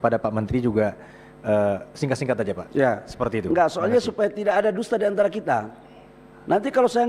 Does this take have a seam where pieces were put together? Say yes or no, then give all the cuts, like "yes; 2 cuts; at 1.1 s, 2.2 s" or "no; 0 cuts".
no; 0 cuts